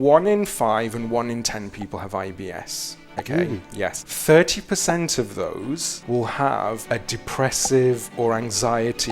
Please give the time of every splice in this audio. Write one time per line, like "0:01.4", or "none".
0:04.1
0:05.9
0:06.8

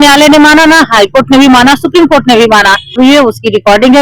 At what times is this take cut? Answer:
0:02.9

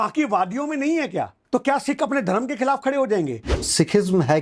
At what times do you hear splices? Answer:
0:01.4
0:03.5

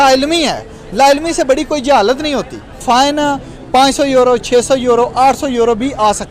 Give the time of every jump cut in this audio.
0:02.8

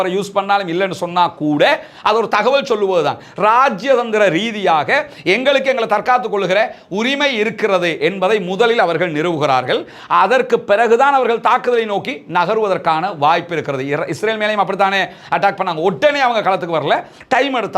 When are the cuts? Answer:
none

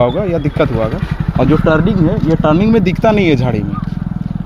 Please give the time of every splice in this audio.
none

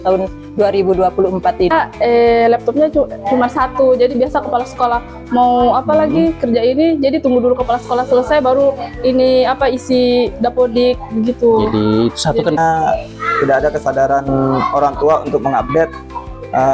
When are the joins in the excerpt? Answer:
0:01.7
0:12.6

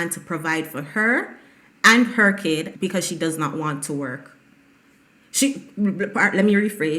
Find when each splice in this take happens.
0:02.7

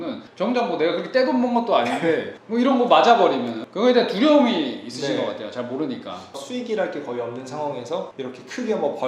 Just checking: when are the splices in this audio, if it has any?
0:03.6
0:06.4

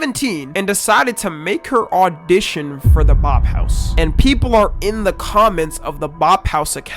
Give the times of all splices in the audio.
none

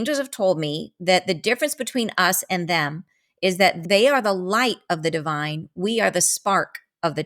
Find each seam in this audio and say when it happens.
0:03.8

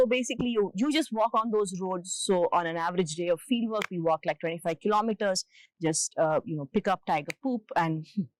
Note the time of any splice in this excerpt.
none

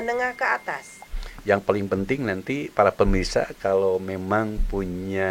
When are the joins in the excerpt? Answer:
0:01.0

